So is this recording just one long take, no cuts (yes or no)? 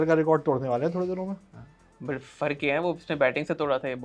yes